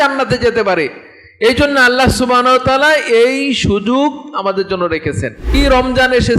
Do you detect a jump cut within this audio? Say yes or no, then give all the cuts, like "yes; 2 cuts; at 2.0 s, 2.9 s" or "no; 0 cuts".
yes; 1 cut; at 5.4 s